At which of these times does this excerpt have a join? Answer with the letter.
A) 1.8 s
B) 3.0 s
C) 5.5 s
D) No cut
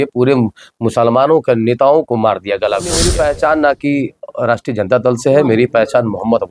B